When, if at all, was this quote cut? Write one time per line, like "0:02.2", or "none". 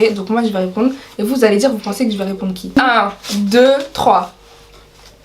0:02.8